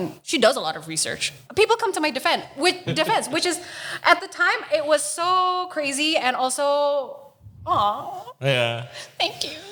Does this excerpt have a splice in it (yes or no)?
no